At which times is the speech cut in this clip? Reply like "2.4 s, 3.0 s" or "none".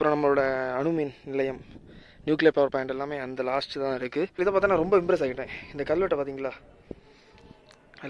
4.3 s